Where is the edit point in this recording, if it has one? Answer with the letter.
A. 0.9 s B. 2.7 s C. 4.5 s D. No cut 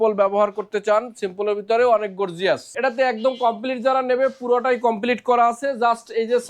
B